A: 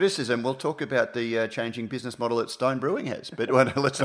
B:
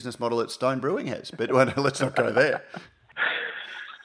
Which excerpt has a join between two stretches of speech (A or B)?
B